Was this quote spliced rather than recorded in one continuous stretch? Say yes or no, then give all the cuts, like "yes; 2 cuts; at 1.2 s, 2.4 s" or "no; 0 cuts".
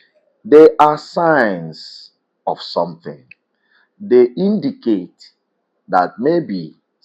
no; 0 cuts